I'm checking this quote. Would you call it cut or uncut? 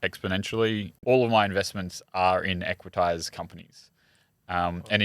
cut